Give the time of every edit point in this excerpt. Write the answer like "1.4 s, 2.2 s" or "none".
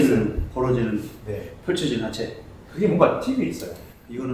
none

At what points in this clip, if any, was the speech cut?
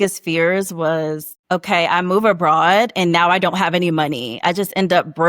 1.3 s

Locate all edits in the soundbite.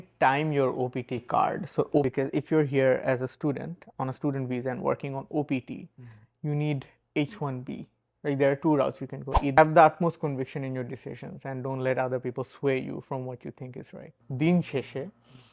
2.1 s, 9.6 s, 14.2 s

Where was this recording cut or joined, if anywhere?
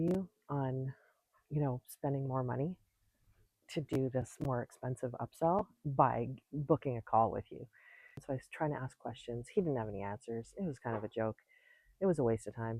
8.2 s

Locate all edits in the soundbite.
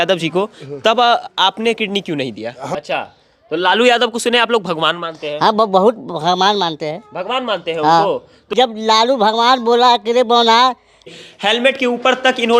2.6 s, 8.4 s, 11.1 s

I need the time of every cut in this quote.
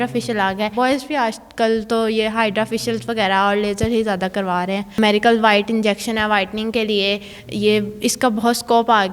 0.7 s, 5.0 s

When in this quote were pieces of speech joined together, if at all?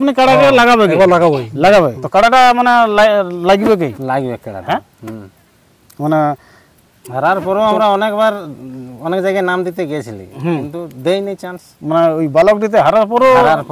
2.0 s

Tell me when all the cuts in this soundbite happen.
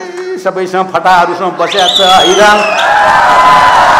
none

